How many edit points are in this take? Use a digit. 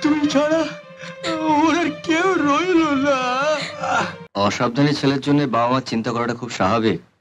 1